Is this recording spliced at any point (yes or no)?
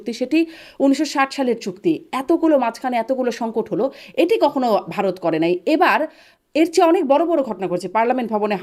no